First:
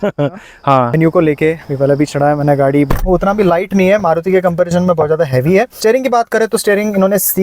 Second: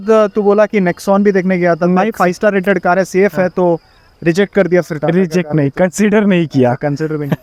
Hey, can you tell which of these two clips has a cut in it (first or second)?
first